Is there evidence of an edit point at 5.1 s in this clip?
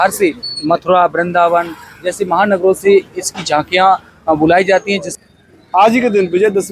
yes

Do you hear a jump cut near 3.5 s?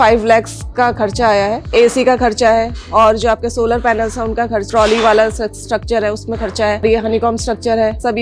no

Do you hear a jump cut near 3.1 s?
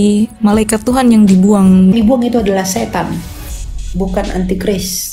no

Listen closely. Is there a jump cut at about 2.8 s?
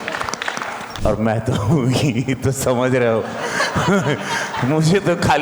no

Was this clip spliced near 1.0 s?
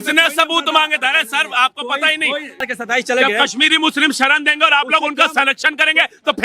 no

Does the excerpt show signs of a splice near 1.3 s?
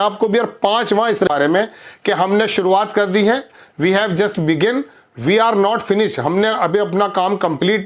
yes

